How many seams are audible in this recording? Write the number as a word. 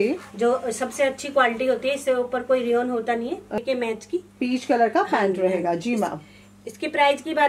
one